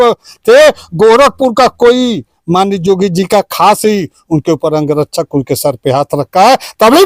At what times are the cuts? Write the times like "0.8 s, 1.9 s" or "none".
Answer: none